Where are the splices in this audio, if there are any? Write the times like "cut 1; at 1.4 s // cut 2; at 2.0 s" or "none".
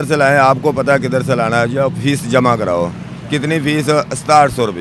none